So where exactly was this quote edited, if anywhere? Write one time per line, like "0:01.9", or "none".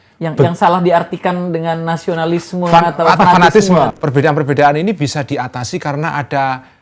0:03.9